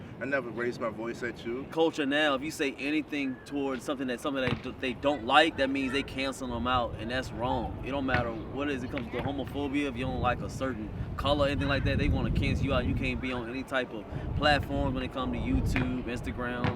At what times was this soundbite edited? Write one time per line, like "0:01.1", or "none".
0:01.7